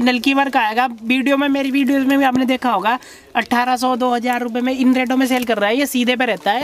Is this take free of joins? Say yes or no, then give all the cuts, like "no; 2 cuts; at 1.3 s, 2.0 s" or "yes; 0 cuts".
yes; 0 cuts